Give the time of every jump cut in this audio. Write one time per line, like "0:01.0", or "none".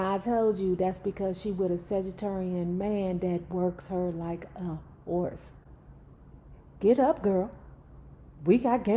none